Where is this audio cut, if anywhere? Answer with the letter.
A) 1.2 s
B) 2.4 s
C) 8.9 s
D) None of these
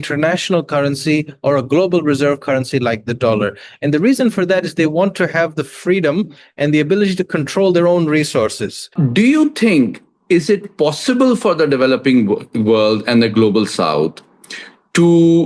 C